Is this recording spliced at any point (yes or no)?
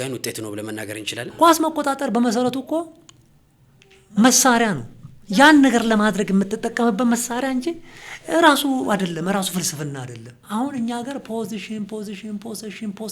yes